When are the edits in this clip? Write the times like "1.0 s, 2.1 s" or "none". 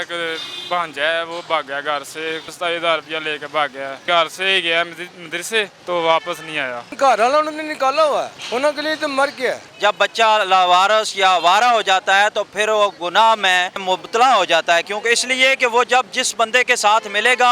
2.5 s, 4.0 s, 5.8 s, 6.9 s, 8.4 s, 9.7 s, 13.8 s